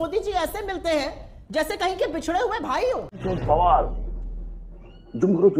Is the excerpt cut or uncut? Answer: uncut